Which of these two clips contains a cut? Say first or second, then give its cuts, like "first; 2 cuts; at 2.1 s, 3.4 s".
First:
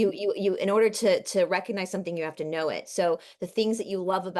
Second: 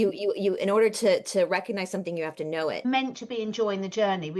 second; 1 cut; at 2.8 s